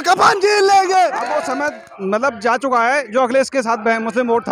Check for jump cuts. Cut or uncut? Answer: cut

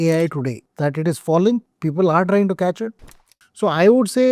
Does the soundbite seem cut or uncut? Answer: cut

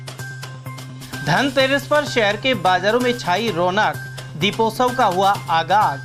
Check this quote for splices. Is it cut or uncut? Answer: uncut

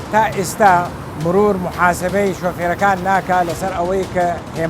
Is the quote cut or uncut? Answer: cut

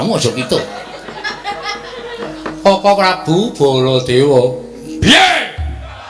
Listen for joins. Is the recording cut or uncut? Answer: cut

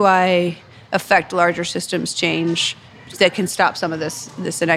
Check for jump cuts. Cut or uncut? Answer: cut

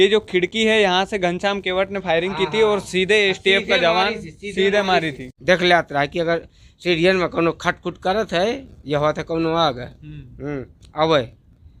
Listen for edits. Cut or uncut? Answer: cut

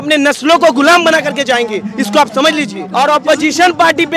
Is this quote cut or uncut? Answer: cut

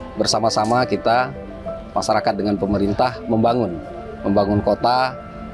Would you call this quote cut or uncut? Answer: uncut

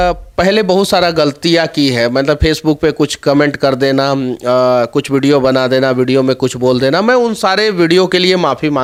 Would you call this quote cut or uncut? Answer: uncut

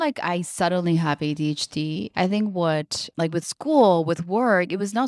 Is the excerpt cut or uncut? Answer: uncut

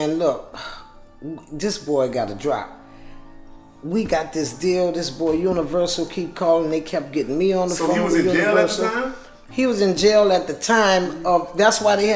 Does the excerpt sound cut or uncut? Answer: uncut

